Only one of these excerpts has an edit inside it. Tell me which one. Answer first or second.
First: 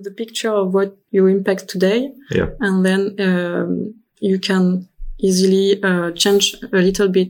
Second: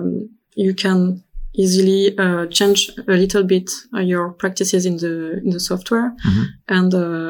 first